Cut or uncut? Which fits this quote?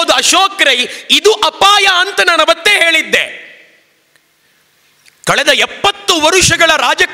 uncut